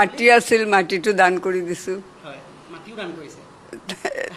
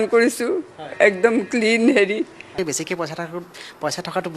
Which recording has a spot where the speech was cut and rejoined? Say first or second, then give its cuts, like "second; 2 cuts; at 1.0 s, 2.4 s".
second; 1 cut; at 2.5 s